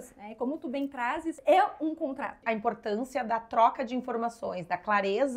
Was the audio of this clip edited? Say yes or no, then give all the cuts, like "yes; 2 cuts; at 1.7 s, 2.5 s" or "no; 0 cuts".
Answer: yes; 2 cuts; at 1.4 s, 2.4 s